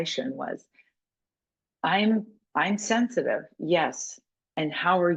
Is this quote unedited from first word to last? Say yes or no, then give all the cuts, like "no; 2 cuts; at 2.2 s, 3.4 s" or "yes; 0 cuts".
yes; 0 cuts